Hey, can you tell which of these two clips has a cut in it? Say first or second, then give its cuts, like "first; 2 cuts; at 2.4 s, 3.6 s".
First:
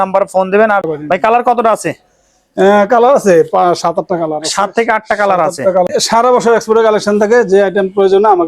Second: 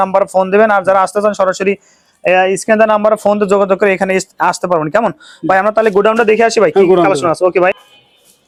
first; 2 cuts; at 0.9 s, 5.8 s